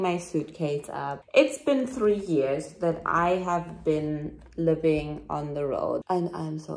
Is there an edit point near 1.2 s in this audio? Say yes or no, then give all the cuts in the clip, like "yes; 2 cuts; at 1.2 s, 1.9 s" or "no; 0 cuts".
yes; 2 cuts; at 1.2 s, 6.0 s